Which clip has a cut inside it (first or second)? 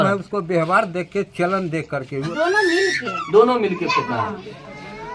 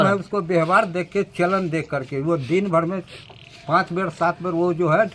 first